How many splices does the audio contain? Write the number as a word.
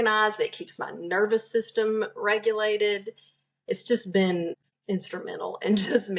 one